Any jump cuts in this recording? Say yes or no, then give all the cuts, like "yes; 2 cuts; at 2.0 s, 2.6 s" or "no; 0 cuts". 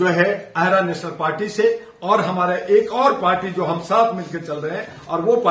no; 0 cuts